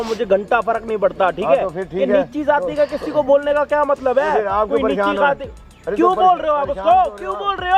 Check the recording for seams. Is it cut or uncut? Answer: uncut